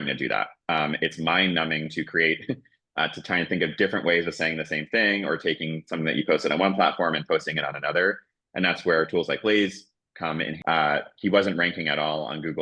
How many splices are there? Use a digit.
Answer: 1